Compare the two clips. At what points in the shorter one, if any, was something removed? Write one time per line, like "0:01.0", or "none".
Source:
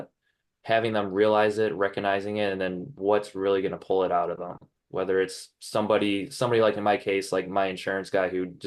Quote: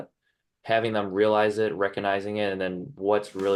none